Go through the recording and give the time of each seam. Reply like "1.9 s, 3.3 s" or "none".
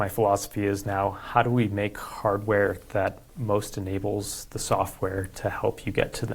none